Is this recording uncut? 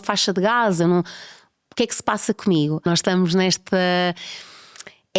no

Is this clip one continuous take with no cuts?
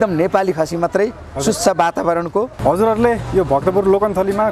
no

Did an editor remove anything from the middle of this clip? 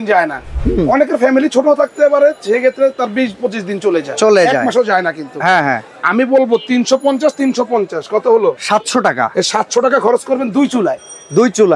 no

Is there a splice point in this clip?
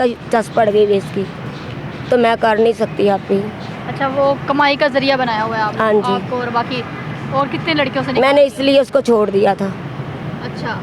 no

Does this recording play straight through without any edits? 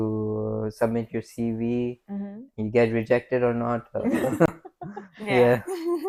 yes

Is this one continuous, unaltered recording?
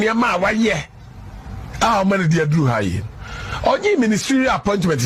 yes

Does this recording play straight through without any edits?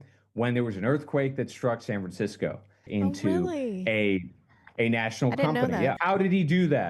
no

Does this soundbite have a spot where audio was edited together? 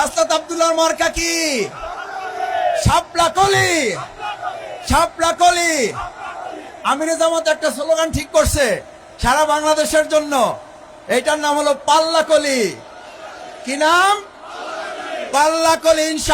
no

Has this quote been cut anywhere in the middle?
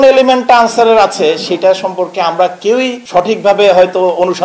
no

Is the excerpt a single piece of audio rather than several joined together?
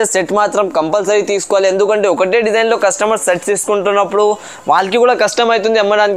yes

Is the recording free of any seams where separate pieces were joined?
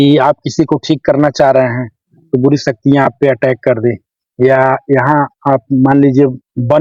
yes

